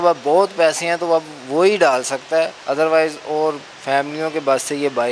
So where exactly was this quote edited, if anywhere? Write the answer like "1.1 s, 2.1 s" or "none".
2.6 s, 3.7 s